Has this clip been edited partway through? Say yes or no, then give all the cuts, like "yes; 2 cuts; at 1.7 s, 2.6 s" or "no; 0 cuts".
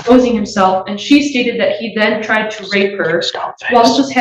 no; 0 cuts